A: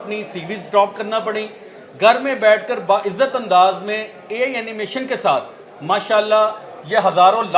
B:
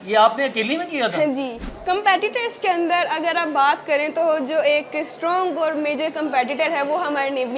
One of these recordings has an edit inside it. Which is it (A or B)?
B